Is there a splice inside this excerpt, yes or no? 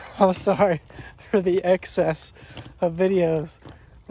no